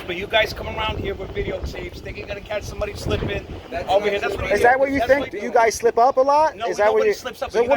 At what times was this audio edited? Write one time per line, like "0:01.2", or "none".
0:05.2